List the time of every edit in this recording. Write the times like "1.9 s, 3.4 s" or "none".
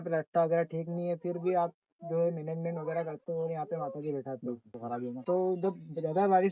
4.8 s